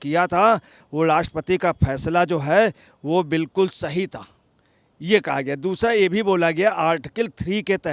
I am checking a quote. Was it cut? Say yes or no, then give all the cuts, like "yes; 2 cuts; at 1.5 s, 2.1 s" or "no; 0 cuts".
no; 0 cuts